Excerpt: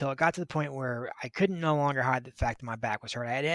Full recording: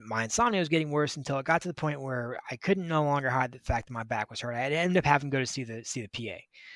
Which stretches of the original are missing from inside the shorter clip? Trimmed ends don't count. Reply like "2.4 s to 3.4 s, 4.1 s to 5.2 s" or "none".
none